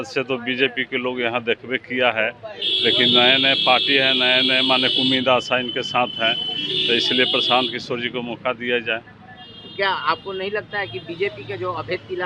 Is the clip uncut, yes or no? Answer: yes